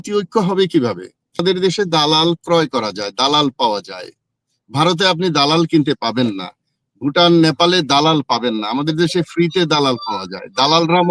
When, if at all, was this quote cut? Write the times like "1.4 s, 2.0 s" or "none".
1.4 s